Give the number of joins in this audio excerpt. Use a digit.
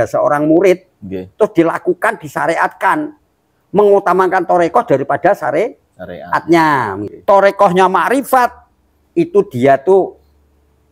1